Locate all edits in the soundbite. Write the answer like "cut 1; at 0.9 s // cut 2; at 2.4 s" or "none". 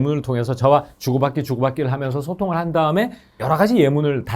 cut 1; at 3.4 s